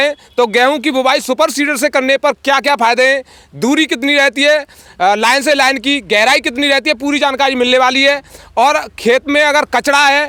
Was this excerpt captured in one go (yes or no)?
yes